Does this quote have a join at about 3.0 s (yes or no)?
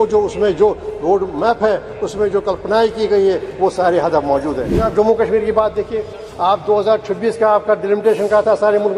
no